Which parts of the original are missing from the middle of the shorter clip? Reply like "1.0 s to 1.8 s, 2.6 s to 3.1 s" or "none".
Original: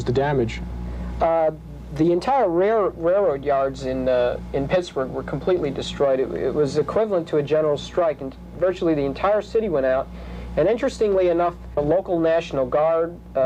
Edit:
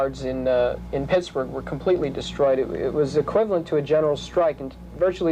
none